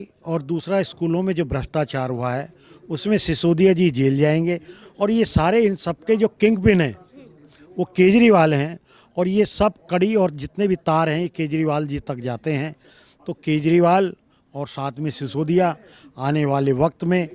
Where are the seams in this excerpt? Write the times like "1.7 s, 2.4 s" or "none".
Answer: none